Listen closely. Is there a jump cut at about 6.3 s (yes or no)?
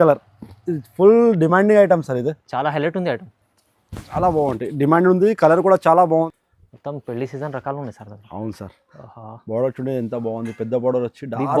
yes